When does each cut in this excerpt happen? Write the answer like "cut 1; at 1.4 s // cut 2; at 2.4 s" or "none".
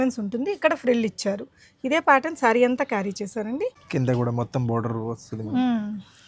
cut 1; at 3.8 s

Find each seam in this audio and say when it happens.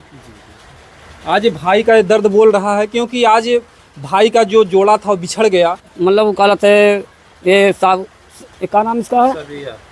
cut 1; at 5.9 s

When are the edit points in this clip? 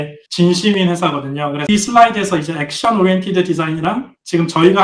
cut 1; at 1.6 s

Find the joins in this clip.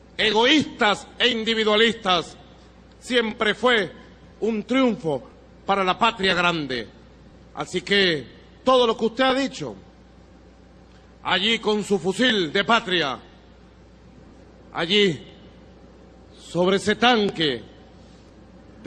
cut 1; at 8.2 s

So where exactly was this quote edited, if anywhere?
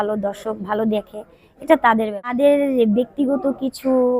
cut 1; at 2.3 s

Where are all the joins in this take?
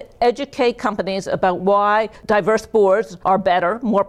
cut 1; at 3.1 s

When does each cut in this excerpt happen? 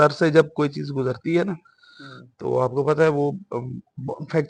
none

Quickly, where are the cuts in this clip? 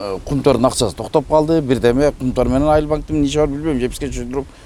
none

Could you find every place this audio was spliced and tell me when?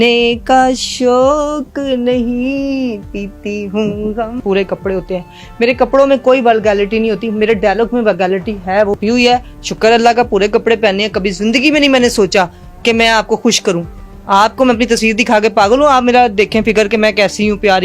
cut 1; at 4.4 s // cut 2; at 9.0 s

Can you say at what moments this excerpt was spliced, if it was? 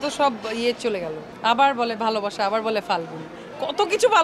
cut 1; at 1.2 s

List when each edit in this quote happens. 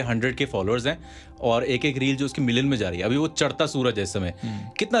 none

